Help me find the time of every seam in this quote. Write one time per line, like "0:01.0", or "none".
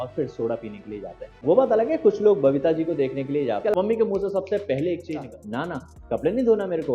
0:01.4
0:03.7
0:05.2